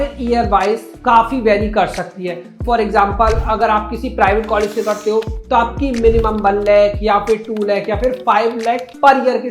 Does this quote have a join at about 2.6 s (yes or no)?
yes